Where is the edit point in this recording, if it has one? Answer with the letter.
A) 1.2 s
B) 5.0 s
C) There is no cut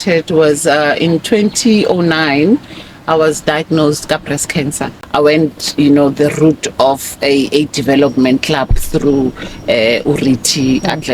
B